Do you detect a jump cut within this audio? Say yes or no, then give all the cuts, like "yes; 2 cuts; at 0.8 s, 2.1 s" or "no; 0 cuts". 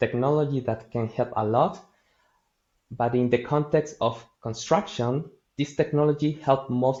no; 0 cuts